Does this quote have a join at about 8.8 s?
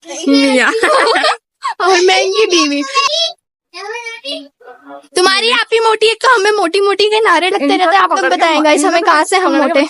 no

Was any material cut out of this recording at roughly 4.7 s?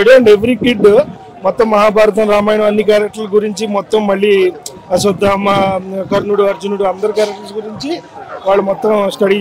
no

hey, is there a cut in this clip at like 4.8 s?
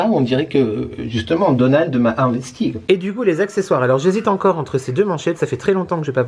no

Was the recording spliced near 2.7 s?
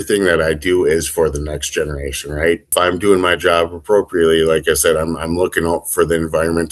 yes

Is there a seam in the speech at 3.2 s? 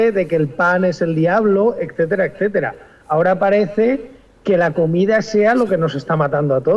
yes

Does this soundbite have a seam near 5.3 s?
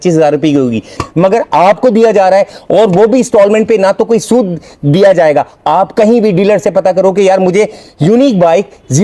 no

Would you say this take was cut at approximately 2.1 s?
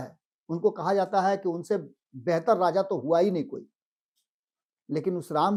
no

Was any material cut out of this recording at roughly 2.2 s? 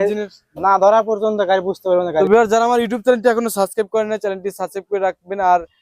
yes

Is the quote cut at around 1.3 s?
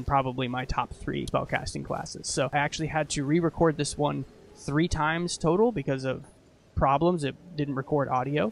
yes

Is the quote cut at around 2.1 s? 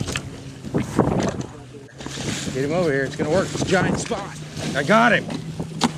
yes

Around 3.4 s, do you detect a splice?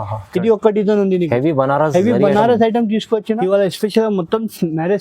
yes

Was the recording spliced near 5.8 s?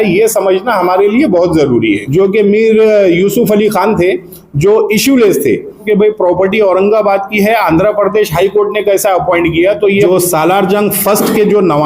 yes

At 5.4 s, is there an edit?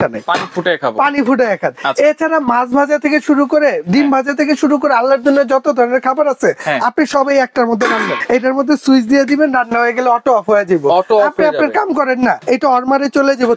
no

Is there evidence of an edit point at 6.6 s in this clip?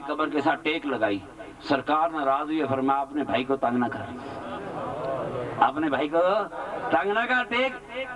yes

